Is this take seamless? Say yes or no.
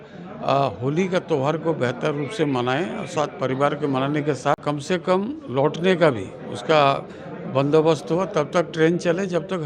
no